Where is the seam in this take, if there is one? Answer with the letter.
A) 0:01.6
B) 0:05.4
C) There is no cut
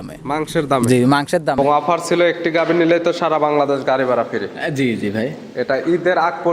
A